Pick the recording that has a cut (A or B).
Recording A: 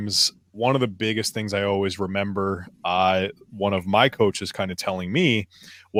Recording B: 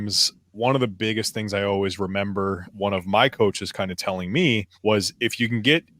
B